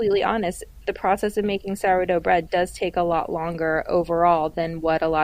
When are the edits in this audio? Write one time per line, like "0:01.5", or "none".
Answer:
none

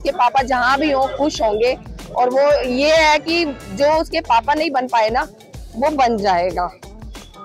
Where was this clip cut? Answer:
none

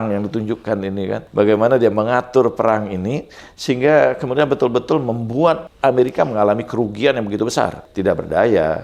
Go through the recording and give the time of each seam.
0:01.2
0:05.7
0:07.8

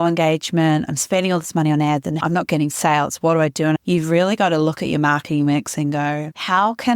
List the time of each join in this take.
0:02.2
0:03.8

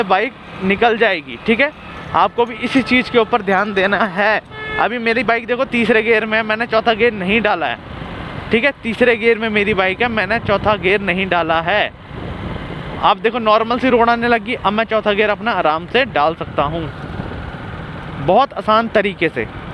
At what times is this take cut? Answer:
none

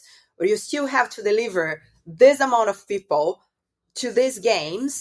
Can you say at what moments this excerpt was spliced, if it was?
none

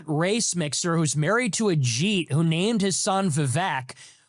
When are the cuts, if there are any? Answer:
none

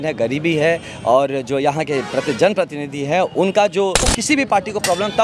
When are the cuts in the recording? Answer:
0:04.1

